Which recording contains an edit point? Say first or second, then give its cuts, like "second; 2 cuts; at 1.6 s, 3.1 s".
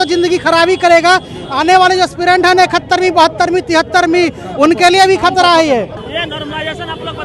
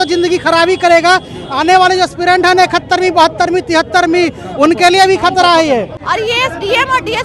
second; 1 cut; at 6.0 s